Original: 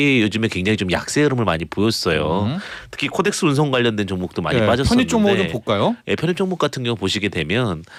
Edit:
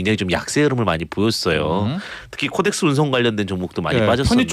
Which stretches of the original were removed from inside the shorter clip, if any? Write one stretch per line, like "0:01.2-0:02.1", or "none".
none